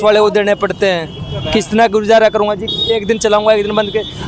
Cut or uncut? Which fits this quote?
uncut